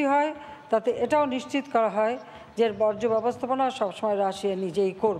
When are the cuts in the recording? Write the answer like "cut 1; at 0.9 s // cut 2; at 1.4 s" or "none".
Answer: none